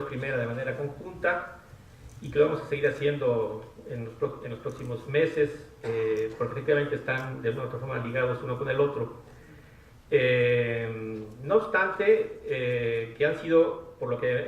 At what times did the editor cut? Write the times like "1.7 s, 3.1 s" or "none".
10.4 s